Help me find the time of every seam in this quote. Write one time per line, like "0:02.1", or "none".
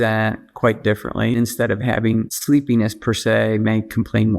0:01.3

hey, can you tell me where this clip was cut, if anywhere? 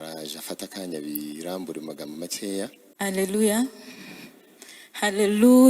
0:02.8

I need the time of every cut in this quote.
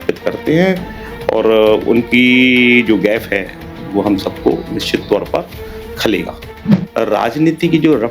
0:06.6

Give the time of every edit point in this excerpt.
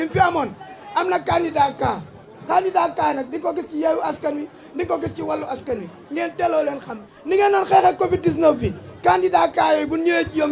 none

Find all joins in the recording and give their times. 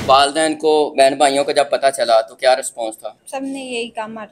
0:03.2

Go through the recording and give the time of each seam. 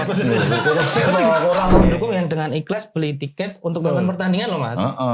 0:01.8

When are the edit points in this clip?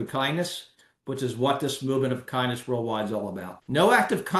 0:03.5

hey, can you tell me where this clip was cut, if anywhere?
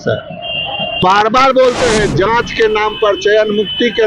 0:01.0

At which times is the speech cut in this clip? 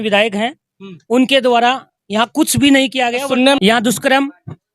0:03.6

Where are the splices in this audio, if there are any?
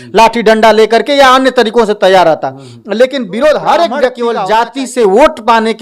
0:04.2

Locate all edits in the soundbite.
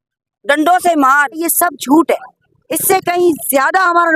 0:01.4

